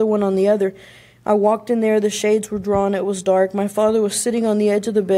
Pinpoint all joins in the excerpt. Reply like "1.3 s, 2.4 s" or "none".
none